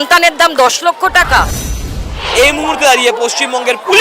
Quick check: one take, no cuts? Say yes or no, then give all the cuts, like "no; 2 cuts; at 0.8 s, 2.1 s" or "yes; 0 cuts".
no; 1 cut; at 2.1 s